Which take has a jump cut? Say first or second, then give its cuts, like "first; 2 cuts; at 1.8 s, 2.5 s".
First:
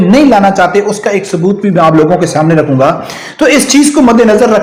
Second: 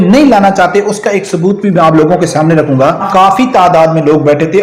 second; 1 cut; at 3.1 s